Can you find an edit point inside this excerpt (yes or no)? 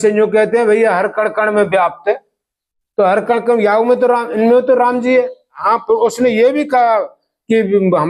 yes